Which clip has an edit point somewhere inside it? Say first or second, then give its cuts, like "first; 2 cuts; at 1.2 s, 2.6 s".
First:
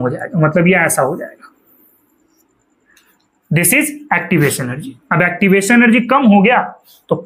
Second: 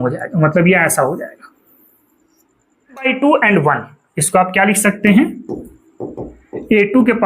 second; 1 cut; at 3.0 s